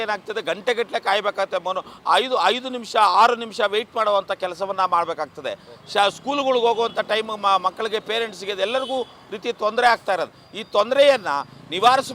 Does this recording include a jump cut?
no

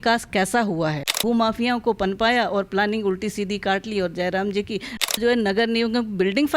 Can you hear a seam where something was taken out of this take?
yes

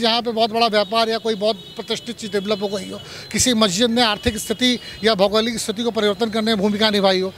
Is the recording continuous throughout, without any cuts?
yes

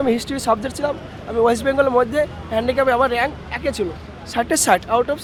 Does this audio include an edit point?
no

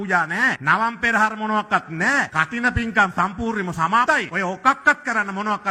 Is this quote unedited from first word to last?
yes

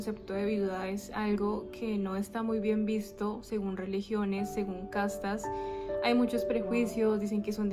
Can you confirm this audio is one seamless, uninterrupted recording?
yes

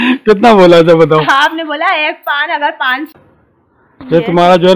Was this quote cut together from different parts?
yes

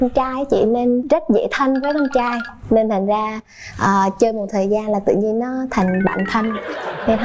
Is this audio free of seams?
yes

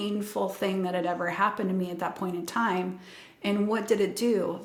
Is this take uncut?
yes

